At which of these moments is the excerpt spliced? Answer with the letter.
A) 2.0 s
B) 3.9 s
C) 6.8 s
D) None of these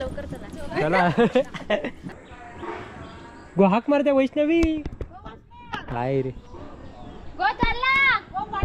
D